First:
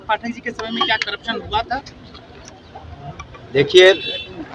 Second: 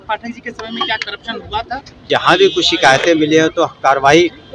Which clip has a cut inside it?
second; 1 cut; at 2.1 s

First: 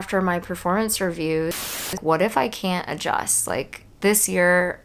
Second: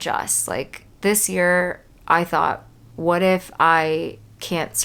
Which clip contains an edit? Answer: first; 1 cut; at 1.7 s

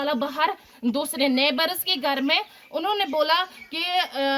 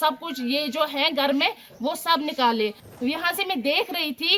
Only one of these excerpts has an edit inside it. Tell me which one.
second; 1 cut; at 2.8 s

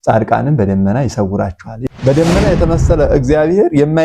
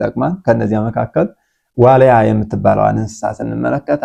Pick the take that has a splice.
first; 1 cut; at 1.7 s

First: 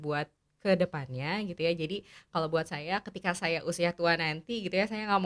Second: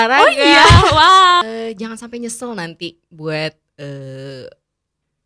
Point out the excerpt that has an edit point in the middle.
second; 1 cut; at 1.4 s

